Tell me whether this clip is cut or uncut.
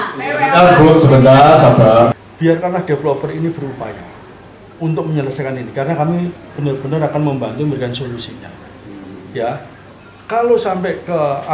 cut